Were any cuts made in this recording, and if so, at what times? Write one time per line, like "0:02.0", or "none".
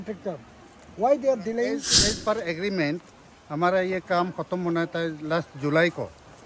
0:01.9